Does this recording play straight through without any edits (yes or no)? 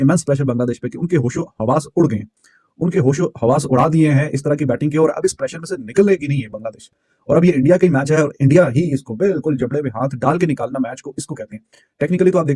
yes